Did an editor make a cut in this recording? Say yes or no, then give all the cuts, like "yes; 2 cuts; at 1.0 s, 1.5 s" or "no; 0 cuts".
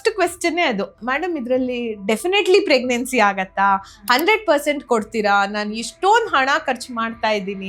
yes; 1 cut; at 0.9 s